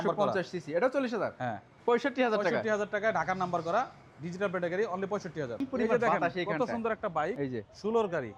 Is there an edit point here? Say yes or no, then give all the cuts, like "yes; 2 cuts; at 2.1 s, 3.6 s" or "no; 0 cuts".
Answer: yes; 2 cuts; at 1.7 s, 5.6 s